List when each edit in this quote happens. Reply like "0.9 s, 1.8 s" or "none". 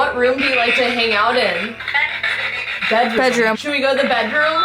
1.8 s, 3.5 s